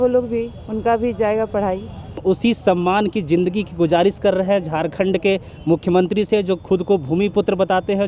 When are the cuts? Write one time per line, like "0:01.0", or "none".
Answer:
0:02.2